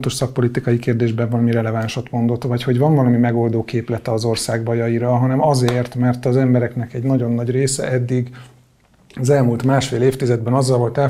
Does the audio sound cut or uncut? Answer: uncut